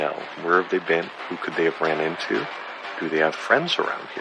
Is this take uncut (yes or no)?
yes